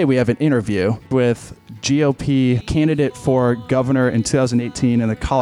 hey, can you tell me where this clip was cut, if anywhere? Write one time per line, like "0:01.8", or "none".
0:01.1
0:02.6